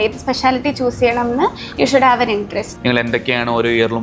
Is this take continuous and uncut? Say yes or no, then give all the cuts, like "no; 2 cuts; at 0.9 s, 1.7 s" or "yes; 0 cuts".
no; 1 cut; at 2.7 s